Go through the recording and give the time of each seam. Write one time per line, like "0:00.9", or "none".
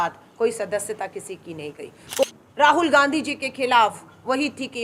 0:02.2